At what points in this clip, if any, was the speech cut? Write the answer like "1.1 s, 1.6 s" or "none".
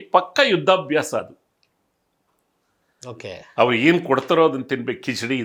none